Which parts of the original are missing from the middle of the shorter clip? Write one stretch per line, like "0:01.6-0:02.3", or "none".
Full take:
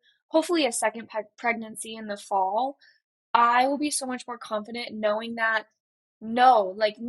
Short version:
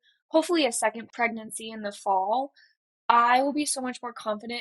0:01.1-0:01.3